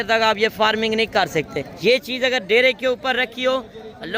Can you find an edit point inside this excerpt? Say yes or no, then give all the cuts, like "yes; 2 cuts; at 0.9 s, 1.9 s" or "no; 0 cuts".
yes; 1 cut; at 1.6 s